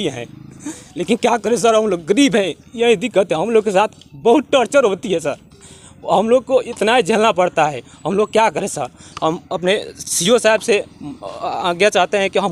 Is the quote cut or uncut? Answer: uncut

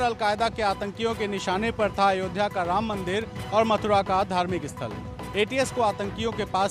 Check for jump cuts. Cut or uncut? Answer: uncut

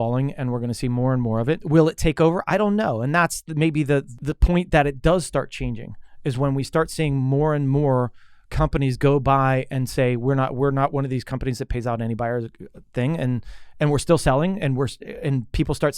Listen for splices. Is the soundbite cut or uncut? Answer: cut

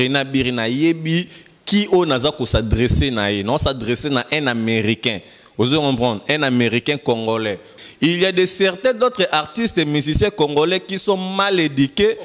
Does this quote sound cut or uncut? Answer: cut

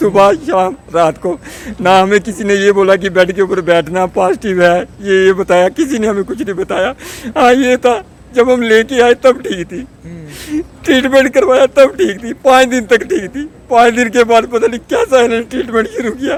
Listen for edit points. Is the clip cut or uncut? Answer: uncut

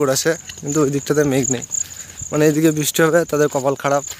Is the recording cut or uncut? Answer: uncut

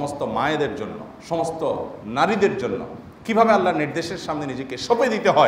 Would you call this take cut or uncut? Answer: uncut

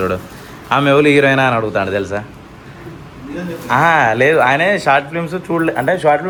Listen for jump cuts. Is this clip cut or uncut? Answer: uncut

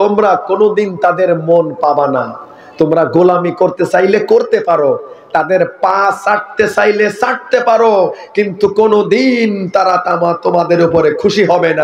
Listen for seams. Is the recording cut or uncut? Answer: uncut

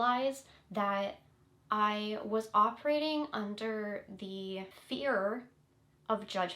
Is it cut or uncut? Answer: cut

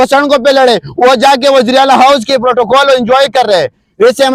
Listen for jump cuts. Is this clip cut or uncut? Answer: uncut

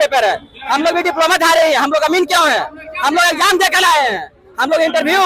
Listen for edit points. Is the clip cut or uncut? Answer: uncut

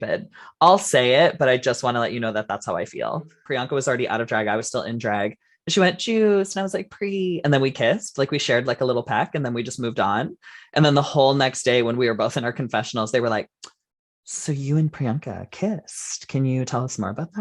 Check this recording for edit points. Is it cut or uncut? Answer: cut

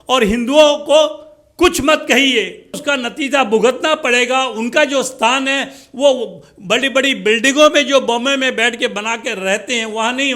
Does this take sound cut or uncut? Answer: cut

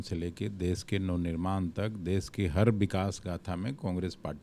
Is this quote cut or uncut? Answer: uncut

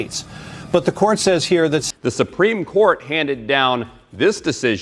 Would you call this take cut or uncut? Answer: cut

